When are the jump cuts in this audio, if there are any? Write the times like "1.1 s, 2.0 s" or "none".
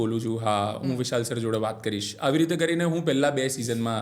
none